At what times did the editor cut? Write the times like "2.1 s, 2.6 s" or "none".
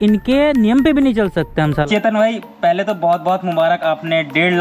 1.9 s